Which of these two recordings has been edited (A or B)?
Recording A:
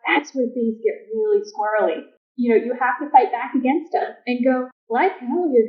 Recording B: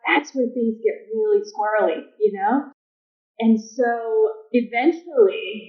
A